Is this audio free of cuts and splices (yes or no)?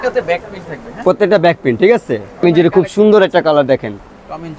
no